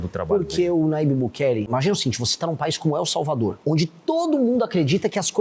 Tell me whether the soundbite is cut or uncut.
cut